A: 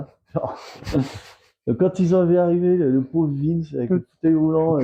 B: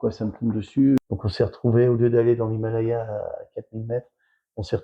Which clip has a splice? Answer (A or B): B